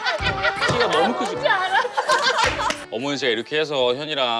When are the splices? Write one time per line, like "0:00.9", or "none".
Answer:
0:02.8